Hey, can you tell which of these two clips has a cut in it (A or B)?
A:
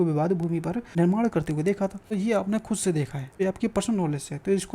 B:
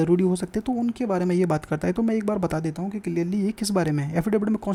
A